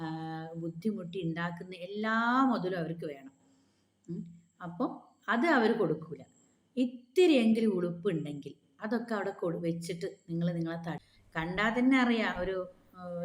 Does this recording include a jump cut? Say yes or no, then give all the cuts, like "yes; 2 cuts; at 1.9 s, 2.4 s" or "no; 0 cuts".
yes; 1 cut; at 11.0 s